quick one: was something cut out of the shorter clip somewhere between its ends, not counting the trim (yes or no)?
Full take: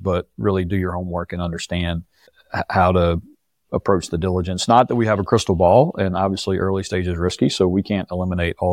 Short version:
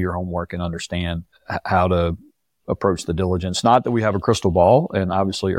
yes